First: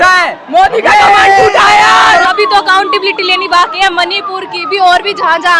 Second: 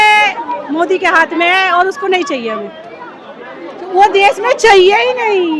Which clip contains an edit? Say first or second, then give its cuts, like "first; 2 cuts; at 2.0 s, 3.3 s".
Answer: first; 1 cut; at 2.3 s